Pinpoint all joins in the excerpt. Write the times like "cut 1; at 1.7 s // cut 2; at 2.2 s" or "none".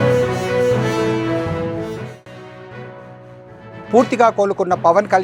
cut 1; at 3.7 s

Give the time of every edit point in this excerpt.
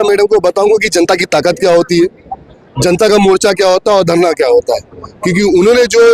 none

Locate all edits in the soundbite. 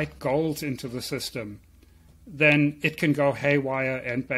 none

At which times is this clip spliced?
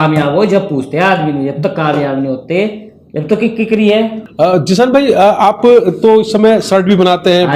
cut 1; at 4.2 s

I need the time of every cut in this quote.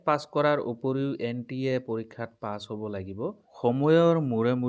cut 1; at 3.5 s

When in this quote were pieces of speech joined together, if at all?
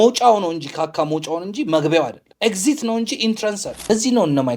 cut 1; at 2.2 s // cut 2; at 3.8 s

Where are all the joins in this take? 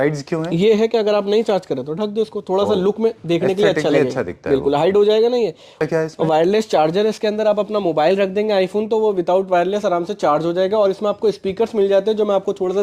cut 1; at 5.8 s

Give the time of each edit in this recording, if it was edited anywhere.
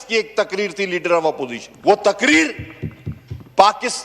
cut 1; at 1.6 s

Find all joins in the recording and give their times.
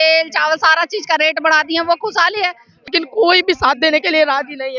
cut 1; at 2.9 s

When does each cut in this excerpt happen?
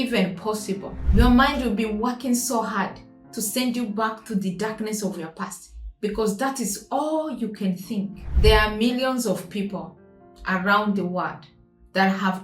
cut 1; at 0.9 s // cut 2; at 8.2 s

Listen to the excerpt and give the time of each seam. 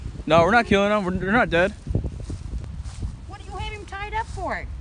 cut 1; at 2.6 s

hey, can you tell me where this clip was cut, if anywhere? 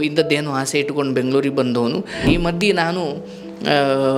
cut 1; at 2.3 s

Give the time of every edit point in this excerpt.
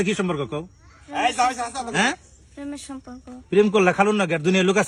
none

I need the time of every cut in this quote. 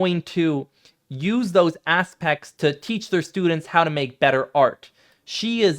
cut 1; at 2.5 s

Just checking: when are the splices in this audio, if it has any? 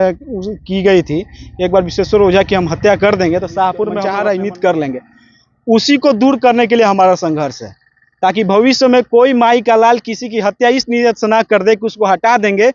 none

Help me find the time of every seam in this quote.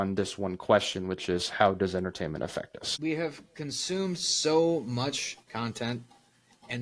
cut 1; at 2.8 s

